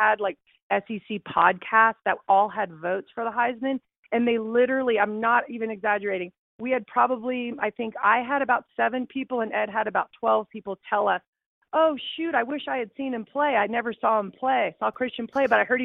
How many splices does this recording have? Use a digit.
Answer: 0